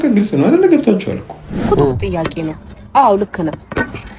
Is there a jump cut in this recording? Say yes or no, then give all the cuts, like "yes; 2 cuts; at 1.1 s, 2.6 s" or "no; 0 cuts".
yes; 1 cut; at 1.7 s